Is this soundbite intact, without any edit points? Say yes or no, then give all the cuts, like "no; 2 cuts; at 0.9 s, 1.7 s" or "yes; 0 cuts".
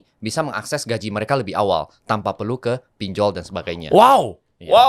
yes; 0 cuts